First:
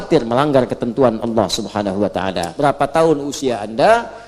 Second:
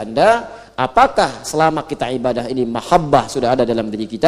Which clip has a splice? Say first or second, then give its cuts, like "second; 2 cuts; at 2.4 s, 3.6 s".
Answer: first; 1 cut; at 2.5 s